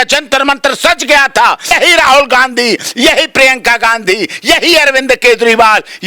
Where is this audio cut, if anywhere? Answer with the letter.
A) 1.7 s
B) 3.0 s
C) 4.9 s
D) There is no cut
A